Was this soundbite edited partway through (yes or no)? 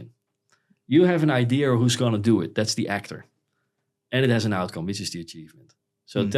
no